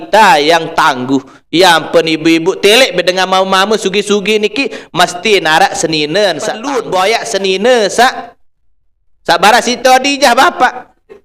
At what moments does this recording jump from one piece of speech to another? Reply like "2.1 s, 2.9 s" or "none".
6.7 s